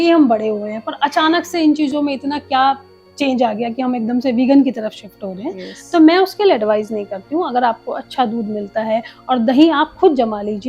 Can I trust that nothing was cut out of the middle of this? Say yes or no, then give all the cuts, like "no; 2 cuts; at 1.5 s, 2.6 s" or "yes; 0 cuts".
yes; 0 cuts